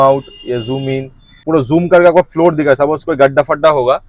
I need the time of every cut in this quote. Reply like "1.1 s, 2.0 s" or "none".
1.4 s